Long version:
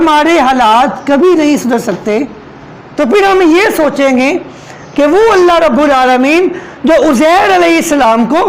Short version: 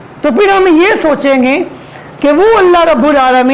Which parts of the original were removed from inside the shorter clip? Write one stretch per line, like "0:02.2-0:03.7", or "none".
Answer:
none